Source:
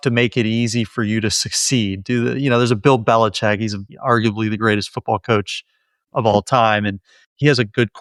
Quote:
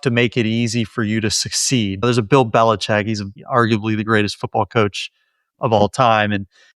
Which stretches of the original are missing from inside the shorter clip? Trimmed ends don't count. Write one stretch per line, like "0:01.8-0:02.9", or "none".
0:02.0-0:02.6